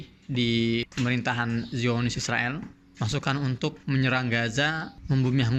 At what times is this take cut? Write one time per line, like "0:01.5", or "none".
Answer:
none